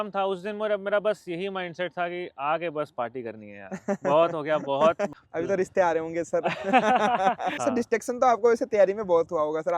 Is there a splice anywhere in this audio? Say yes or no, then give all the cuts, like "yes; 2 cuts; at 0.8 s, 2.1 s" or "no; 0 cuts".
yes; 2 cuts; at 5.1 s, 7.5 s